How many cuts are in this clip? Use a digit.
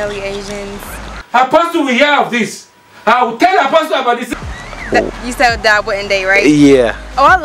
2